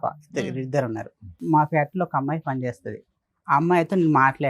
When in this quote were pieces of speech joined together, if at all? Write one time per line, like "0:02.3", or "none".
0:01.4